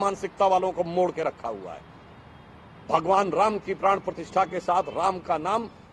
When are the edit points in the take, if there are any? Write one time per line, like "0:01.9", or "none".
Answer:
none

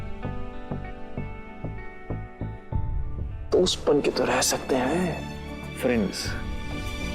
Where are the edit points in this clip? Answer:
0:03.4

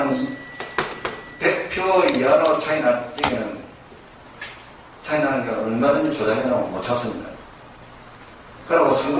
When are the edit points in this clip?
none

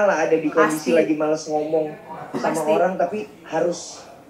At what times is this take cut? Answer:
none

